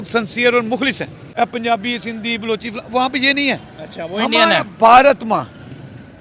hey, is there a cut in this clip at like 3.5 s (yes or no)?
no